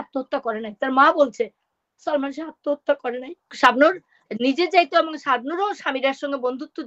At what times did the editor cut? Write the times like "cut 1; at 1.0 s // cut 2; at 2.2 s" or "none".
cut 1; at 3.5 s